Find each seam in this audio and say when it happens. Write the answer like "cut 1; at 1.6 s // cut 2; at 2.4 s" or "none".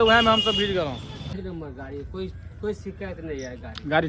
cut 1; at 1.4 s